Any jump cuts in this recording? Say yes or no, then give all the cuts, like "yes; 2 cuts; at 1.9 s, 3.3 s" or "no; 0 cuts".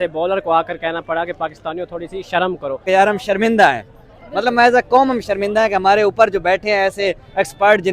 yes; 1 cut; at 2.8 s